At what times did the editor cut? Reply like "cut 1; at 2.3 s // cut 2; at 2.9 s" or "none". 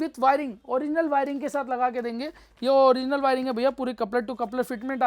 none

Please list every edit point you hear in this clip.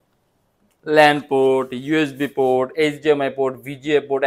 none

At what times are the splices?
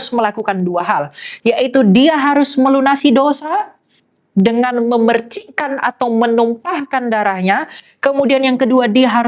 none

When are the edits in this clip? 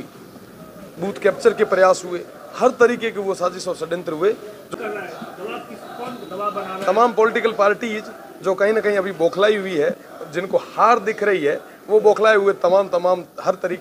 cut 1; at 4.6 s

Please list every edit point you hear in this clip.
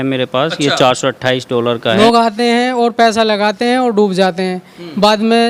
cut 1; at 2.0 s

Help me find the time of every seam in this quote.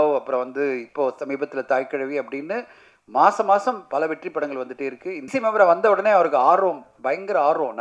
cut 1; at 5.3 s

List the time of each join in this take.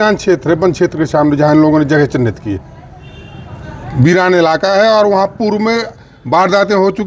none

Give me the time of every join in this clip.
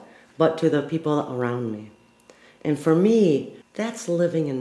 cut 1; at 3.6 s

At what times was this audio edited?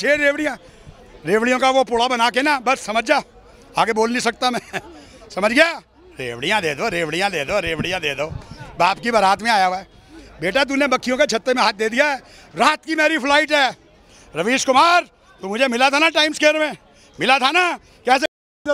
none

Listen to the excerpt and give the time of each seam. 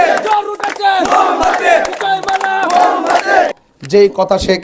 cut 1; at 3.5 s

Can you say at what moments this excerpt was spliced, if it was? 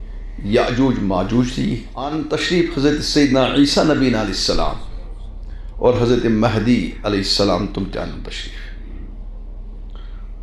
cut 1; at 2.1 s

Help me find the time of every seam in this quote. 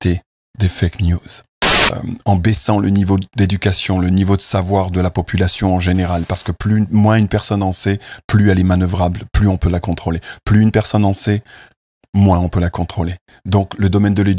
cut 1; at 1.9 s

